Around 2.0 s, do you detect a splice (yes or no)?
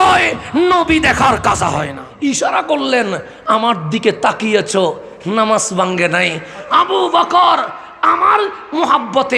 yes